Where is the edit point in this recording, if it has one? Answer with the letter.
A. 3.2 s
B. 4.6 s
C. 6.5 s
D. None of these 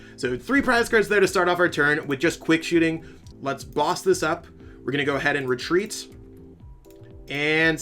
A